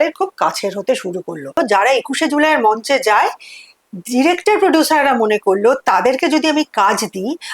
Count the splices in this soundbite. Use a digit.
1